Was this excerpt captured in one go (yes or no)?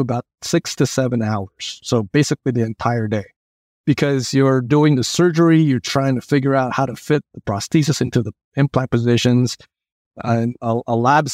yes